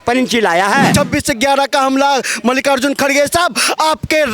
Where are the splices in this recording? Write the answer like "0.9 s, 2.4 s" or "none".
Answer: 0.9 s